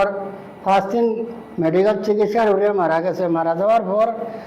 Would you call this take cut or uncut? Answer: uncut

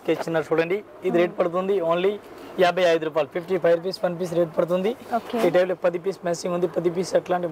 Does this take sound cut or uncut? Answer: uncut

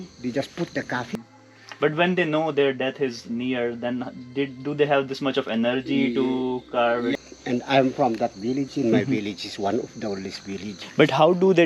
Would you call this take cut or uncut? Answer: cut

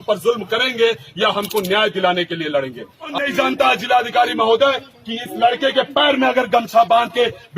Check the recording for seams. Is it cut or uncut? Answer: cut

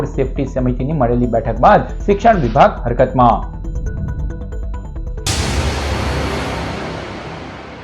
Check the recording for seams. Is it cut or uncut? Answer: cut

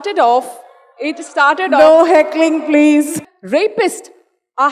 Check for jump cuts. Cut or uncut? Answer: cut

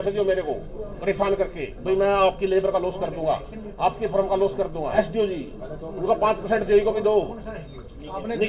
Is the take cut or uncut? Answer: cut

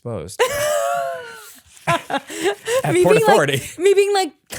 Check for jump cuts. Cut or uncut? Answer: uncut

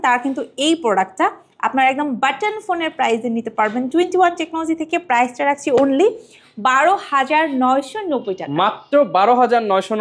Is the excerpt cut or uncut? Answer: uncut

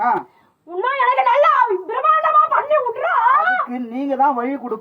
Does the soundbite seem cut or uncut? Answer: uncut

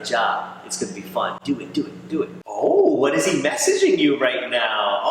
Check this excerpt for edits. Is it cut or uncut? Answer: uncut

